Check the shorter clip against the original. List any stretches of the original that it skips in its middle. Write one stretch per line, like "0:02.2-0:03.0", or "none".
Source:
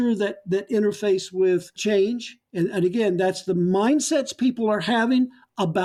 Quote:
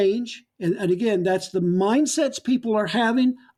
none